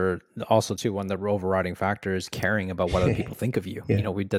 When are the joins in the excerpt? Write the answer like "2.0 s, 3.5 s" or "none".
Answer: none